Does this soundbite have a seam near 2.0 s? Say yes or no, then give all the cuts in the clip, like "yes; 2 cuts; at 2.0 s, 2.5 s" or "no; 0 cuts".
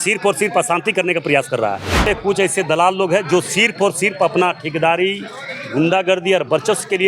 yes; 1 cut; at 2.0 s